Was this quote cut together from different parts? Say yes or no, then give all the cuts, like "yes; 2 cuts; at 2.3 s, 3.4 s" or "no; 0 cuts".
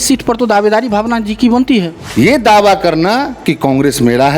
yes; 1 cut; at 2.0 s